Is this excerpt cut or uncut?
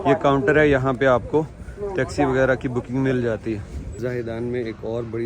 cut